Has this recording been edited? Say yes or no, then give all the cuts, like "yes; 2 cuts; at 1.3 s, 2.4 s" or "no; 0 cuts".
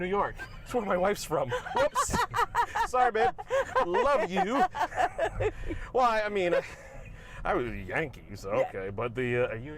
no; 0 cuts